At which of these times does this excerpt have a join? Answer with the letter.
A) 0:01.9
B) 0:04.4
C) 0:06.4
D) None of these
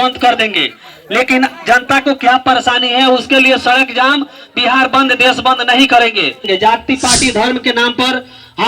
C